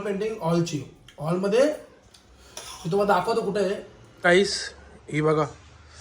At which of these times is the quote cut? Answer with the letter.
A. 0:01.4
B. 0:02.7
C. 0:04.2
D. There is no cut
C